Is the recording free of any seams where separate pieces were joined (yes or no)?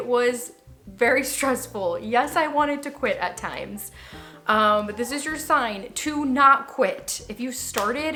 yes